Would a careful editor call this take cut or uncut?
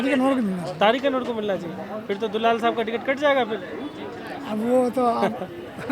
uncut